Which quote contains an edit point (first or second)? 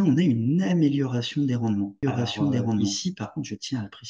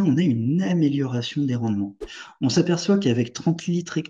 second